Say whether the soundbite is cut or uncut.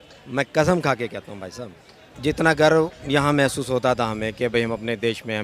cut